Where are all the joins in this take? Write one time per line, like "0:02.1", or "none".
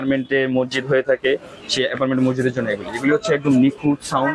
none